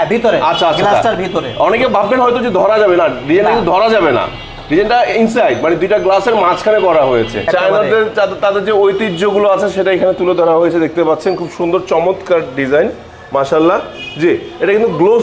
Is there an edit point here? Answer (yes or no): yes